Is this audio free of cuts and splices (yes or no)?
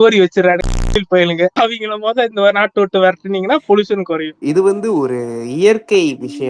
yes